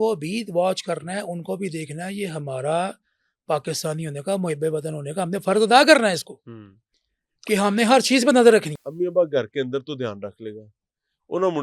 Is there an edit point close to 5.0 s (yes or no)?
no